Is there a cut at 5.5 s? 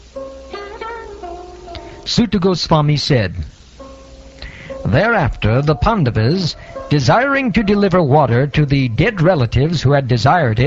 yes; 1 cut; at 5.5 s

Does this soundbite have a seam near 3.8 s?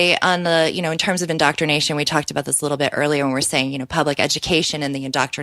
no; 0 cuts

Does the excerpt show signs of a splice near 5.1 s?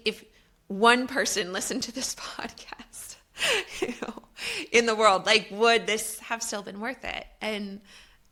no; 0 cuts

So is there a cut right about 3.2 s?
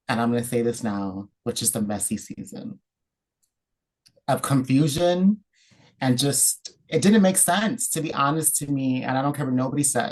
no; 0 cuts

